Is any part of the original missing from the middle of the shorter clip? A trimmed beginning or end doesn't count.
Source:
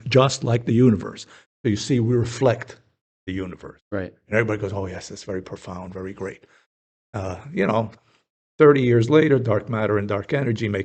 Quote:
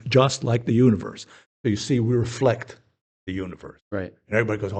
no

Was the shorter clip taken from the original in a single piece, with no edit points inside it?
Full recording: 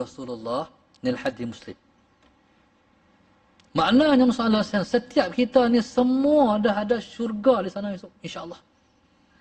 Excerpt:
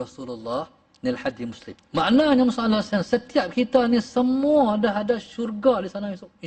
no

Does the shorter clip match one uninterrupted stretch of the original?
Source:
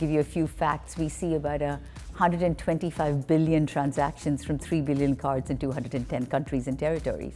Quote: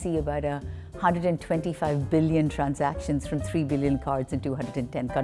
yes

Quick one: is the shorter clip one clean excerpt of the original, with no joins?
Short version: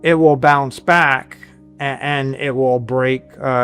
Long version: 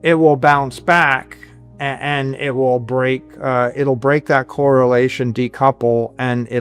yes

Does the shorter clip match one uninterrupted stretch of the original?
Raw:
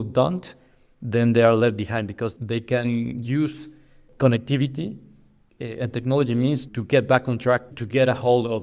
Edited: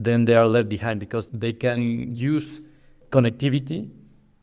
yes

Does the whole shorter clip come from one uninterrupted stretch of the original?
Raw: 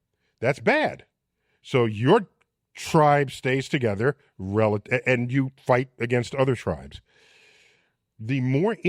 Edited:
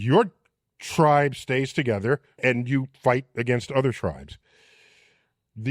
no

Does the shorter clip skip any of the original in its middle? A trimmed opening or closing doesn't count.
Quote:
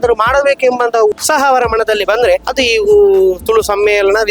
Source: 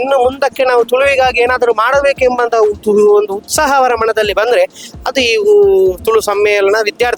yes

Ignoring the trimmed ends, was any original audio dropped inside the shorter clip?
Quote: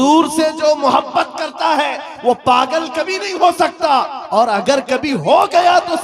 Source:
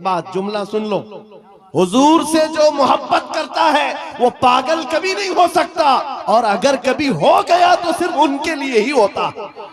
no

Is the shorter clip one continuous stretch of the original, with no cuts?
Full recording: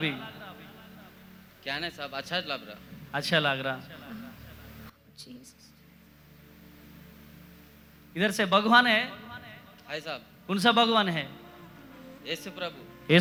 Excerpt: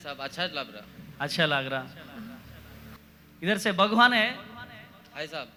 no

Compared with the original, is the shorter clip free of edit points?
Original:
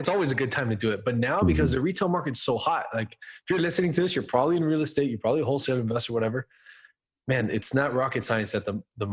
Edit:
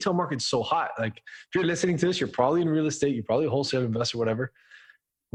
yes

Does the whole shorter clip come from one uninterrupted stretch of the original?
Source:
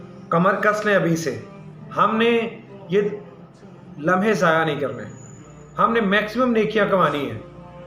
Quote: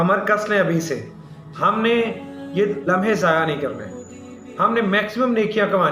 no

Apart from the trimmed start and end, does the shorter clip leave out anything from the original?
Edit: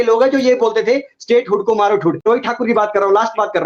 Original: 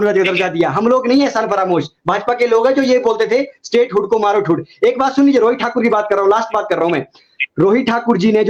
yes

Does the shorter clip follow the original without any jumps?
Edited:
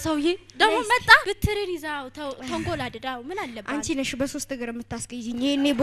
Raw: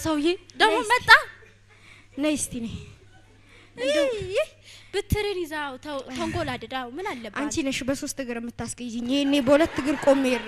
no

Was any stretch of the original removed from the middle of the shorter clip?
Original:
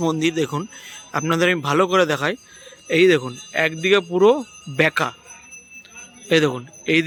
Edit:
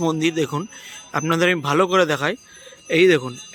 no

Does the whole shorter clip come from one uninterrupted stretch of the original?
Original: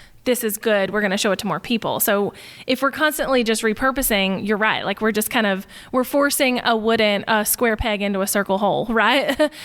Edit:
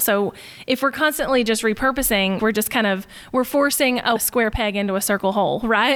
no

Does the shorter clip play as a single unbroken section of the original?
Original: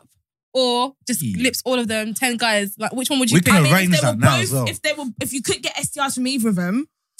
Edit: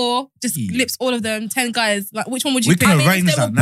yes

